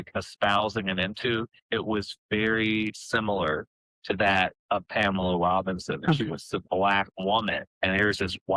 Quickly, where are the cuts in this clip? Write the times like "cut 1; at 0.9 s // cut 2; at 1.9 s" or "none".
cut 1; at 1.6 s // cut 2; at 7.6 s

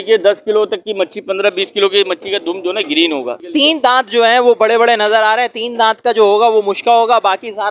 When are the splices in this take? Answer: cut 1; at 3.4 s

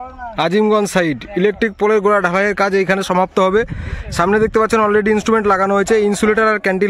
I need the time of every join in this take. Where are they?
none

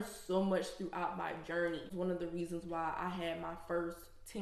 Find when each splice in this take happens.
cut 1; at 1.9 s

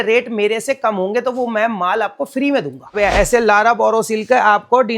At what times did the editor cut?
cut 1; at 3.0 s

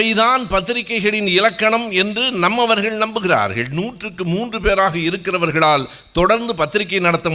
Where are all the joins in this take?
none

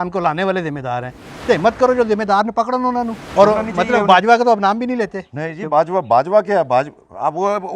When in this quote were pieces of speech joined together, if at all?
cut 1; at 1.2 s // cut 2; at 3.2 s

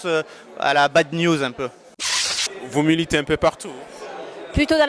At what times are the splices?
cut 1; at 2.3 s

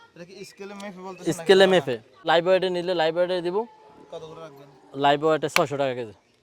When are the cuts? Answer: cut 1; at 2.1 s

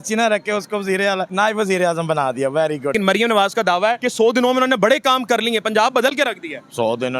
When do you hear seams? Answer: cut 1; at 1.3 s // cut 2; at 2.9 s // cut 3; at 4.0 s

